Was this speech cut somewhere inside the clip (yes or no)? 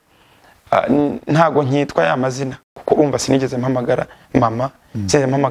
yes